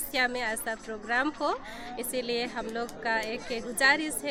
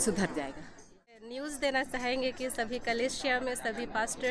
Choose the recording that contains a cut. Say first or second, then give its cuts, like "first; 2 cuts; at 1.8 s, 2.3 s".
second; 1 cut; at 1.3 s